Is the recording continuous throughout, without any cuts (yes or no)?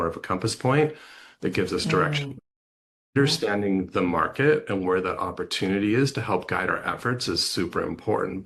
yes